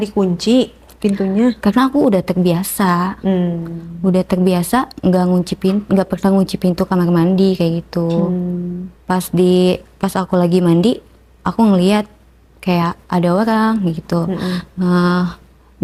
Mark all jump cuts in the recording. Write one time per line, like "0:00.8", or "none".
none

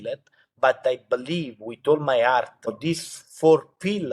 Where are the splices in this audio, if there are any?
0:02.8

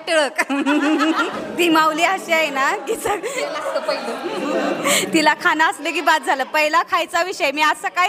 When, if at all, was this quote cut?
0:01.4

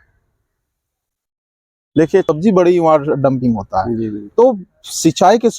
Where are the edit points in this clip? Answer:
0:02.3

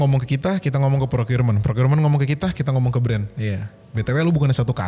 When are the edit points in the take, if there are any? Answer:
none

